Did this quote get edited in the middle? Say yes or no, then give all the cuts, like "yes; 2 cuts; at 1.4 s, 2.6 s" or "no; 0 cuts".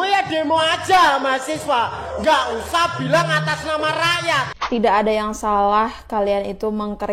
yes; 1 cut; at 4.5 s